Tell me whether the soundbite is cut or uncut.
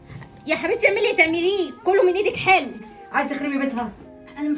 cut